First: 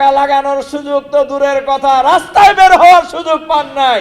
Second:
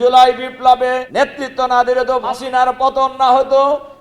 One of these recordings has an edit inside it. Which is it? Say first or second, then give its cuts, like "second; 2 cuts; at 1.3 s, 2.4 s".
second; 2 cuts; at 1.1 s, 2.3 s